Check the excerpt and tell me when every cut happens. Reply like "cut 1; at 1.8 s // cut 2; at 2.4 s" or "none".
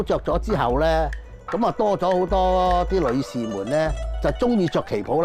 cut 1; at 4.1 s